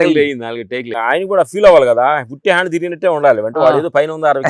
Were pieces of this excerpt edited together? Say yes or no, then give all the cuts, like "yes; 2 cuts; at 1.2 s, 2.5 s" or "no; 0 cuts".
yes; 1 cut; at 0.9 s